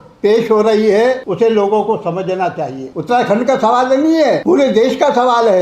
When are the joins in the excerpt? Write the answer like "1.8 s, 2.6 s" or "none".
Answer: 1.2 s, 2.9 s, 4.4 s